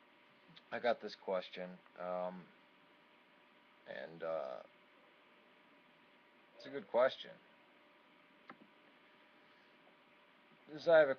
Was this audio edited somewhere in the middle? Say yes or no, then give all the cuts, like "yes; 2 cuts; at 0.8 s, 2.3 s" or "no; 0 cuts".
yes; 1 cut; at 6.2 s